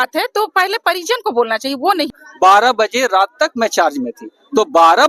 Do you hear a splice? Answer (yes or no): yes